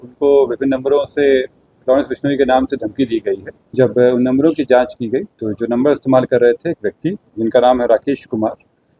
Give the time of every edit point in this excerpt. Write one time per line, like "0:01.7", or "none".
0:03.6